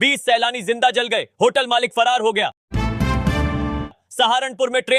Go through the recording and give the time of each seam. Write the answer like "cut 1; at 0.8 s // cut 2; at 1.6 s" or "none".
cut 1; at 2.6 s // cut 2; at 3.9 s